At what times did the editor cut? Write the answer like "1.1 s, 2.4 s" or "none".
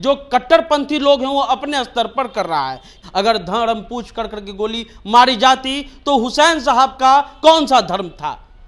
2.9 s